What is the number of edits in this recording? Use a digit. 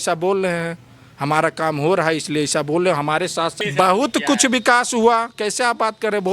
1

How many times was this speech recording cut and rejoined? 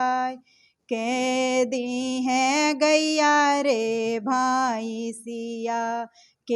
0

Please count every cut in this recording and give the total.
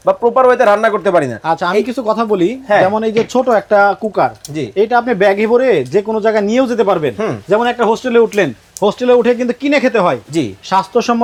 0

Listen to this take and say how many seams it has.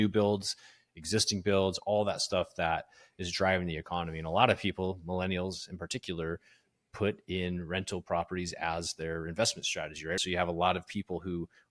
1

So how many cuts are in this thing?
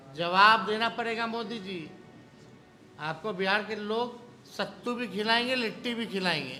0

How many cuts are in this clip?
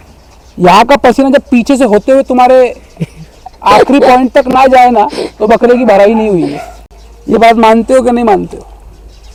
0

